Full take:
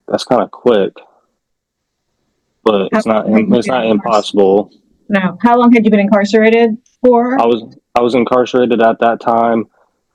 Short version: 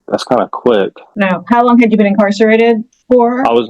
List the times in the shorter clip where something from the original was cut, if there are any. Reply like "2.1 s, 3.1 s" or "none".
1.0 s